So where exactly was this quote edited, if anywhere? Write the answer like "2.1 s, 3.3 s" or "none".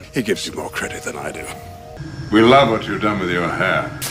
1.9 s